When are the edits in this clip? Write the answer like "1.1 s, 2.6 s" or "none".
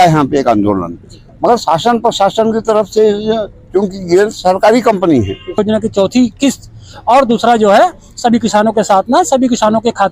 5.6 s